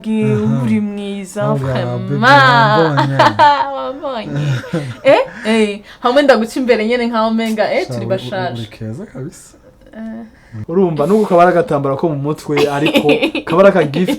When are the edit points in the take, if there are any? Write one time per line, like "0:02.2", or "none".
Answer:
0:10.5

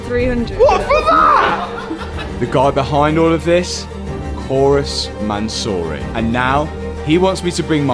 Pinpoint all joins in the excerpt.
none

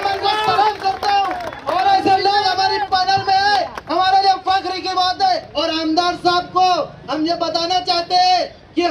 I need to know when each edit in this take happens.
0:05.5

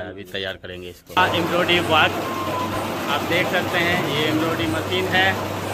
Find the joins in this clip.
0:01.2

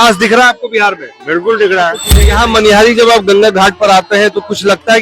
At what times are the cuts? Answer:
0:02.1

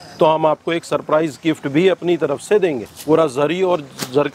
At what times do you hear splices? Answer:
0:02.9

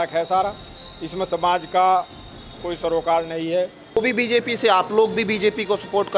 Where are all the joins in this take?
0:04.0

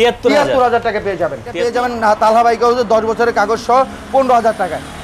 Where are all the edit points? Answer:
0:01.9

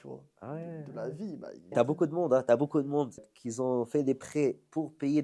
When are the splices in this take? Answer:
0:01.7
0:03.3

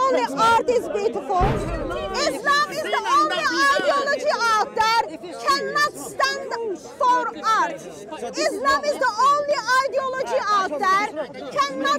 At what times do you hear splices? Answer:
0:01.7

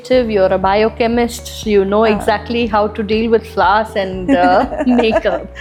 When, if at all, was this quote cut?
none

